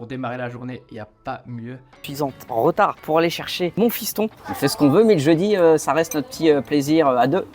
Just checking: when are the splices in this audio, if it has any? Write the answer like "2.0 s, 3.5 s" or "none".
2.0 s, 4.4 s